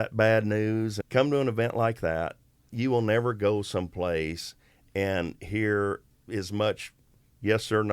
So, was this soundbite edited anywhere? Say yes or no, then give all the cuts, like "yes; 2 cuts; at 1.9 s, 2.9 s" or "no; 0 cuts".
yes; 3 cuts; at 1.0 s, 2.7 s, 6.1 s